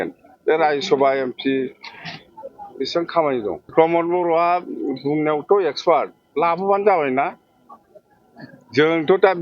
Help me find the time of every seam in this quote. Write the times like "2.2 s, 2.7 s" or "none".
3.7 s